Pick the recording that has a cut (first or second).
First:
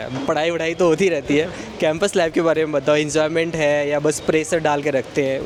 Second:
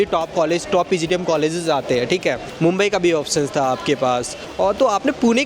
second